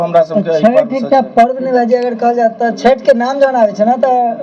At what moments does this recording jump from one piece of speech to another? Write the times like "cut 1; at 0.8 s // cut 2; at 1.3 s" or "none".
none